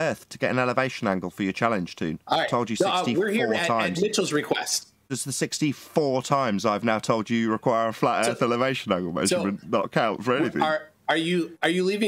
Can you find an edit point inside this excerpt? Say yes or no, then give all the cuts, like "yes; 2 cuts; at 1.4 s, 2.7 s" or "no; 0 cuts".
yes; 1 cut; at 5.0 s